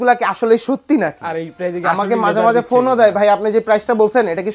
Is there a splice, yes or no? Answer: no